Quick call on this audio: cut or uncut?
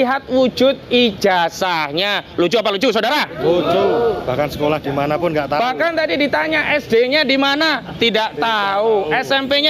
uncut